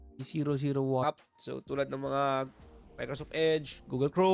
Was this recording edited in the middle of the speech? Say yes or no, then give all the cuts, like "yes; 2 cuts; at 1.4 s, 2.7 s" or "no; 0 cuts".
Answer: yes; 1 cut; at 1.0 s